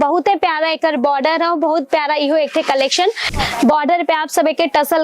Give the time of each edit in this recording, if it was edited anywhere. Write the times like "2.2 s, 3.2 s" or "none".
3.3 s